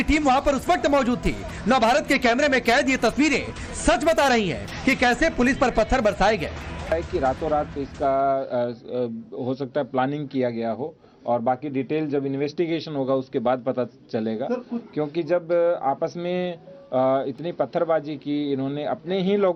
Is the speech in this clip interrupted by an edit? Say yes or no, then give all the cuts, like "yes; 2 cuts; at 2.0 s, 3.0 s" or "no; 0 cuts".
no; 0 cuts